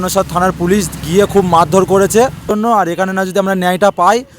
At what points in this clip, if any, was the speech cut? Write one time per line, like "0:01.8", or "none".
0:02.5